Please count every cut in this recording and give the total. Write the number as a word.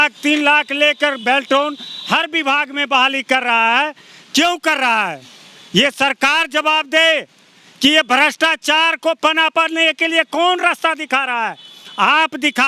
zero